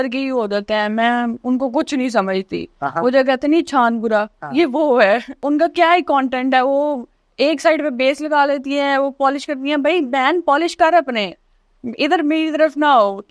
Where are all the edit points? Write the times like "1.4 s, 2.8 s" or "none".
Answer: 5.4 s